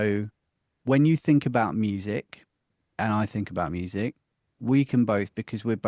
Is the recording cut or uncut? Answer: uncut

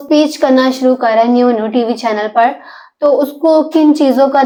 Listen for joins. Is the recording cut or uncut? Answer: uncut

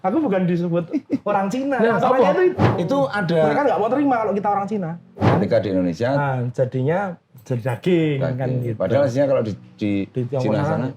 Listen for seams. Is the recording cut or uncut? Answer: cut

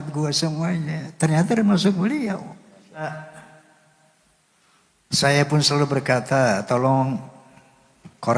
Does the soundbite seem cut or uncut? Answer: cut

